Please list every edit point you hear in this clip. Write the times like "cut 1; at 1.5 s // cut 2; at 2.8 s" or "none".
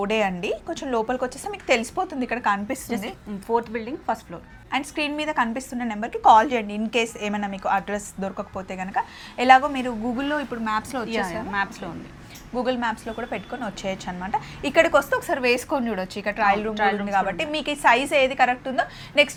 none